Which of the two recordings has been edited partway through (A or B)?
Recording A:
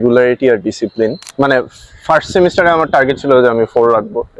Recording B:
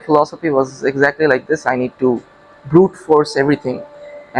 A